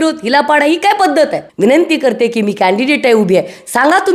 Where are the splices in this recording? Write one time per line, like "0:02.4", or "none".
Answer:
0:01.4